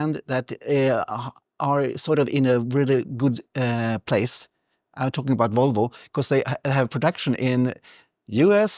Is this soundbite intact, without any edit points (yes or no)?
yes